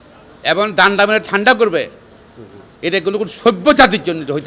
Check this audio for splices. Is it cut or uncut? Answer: uncut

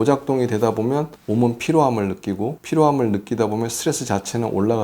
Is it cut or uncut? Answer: cut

